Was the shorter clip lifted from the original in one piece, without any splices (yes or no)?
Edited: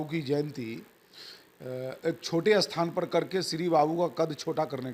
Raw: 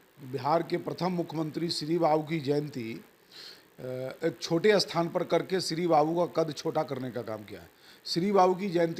yes